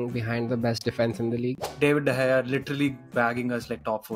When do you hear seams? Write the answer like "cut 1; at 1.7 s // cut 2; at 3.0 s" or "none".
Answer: cut 1; at 1.7 s